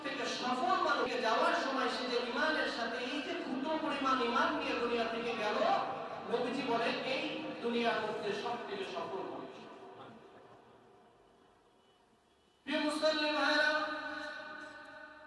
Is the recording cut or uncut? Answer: cut